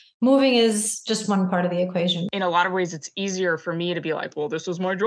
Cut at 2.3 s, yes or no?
yes